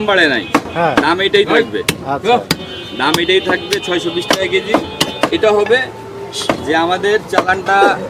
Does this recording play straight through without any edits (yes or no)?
yes